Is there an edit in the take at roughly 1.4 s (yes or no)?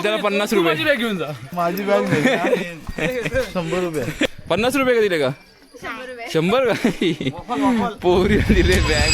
yes